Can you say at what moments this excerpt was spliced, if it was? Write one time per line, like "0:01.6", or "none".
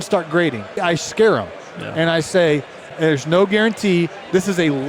0:00.8
0:02.9